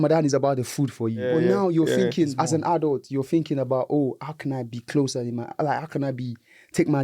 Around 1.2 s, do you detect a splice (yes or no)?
yes